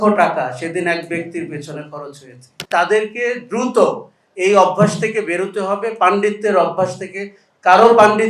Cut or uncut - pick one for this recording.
cut